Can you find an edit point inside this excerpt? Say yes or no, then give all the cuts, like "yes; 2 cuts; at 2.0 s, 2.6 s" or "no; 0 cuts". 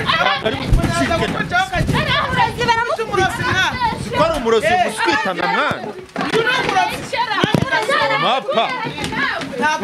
no; 0 cuts